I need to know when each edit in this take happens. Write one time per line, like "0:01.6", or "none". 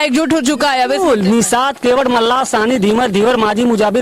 none